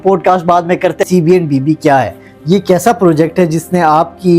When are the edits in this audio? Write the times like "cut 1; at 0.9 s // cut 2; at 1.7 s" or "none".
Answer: cut 1; at 1.1 s